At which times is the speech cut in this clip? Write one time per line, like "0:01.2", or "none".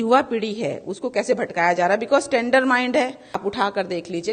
0:02.9